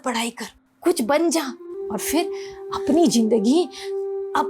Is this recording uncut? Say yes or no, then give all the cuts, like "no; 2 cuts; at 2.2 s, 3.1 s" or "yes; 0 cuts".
no; 1 cut; at 1.7 s